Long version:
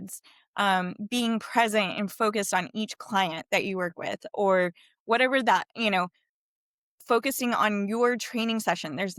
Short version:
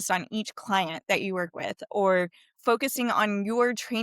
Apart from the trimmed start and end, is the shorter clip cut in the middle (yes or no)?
yes